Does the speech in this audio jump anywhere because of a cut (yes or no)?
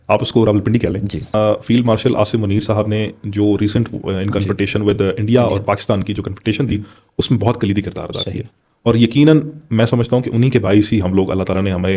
yes